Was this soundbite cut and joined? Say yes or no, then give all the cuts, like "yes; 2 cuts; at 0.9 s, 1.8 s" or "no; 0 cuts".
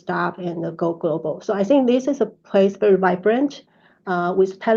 no; 0 cuts